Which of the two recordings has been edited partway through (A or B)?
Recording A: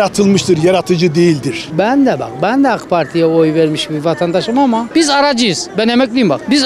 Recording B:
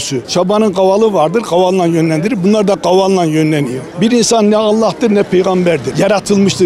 A